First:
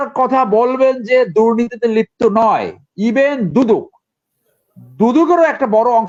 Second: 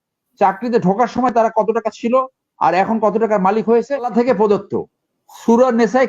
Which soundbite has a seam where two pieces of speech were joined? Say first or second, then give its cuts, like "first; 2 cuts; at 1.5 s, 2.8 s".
second; 1 cut; at 4.1 s